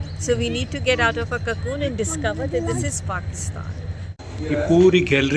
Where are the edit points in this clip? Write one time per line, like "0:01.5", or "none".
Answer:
0:04.0